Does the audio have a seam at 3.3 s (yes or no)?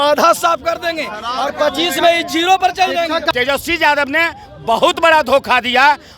yes